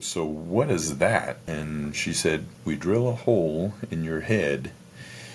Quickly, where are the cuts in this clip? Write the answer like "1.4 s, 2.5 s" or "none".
1.4 s, 2.5 s